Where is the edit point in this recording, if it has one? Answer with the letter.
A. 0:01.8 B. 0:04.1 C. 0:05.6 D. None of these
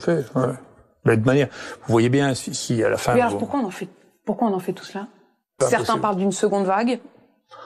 C